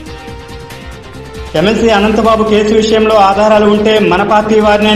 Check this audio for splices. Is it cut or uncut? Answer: cut